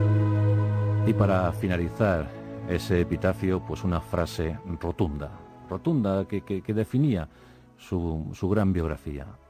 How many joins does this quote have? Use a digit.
1